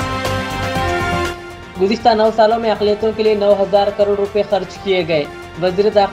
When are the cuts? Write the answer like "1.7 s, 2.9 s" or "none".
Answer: 1.1 s